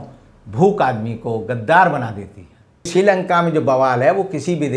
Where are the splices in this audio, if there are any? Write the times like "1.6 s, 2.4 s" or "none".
2.9 s